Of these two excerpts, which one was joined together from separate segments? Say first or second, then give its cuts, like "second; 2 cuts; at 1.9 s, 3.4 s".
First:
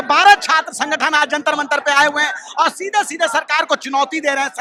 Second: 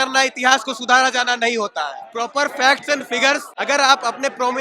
second; 2 cuts; at 2.0 s, 3.5 s